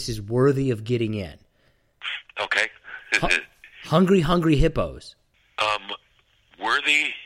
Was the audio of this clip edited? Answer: no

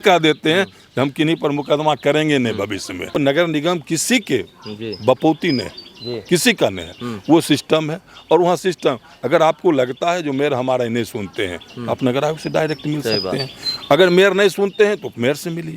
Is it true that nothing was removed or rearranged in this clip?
no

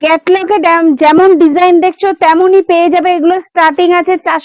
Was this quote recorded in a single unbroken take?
yes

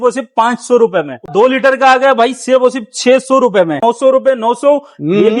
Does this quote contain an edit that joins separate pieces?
yes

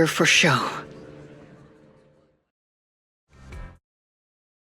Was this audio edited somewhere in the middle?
no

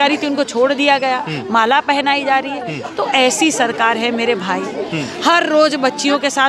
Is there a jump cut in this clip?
no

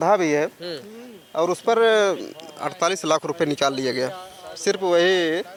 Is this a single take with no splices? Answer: yes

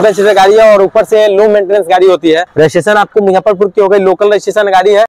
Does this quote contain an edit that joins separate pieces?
yes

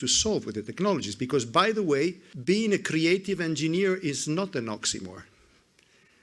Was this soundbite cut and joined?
yes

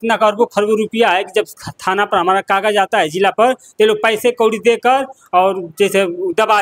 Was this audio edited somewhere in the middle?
no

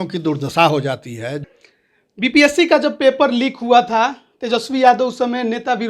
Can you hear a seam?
yes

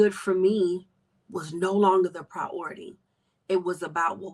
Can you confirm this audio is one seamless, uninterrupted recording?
yes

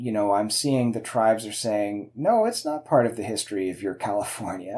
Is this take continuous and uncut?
yes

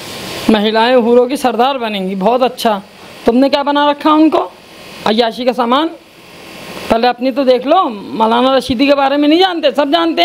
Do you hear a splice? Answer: no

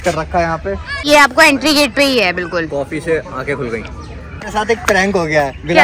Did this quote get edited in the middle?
yes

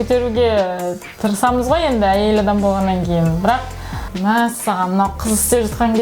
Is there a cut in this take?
yes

